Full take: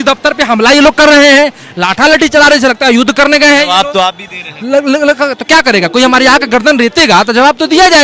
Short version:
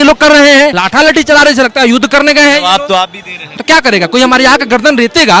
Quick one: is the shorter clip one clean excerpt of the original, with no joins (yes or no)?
no